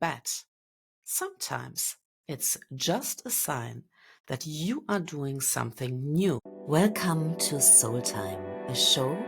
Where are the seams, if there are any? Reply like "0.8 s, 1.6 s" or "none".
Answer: 6.5 s